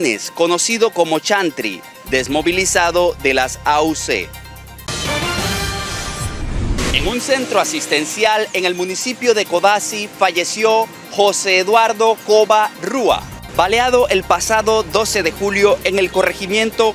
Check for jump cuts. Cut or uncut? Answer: cut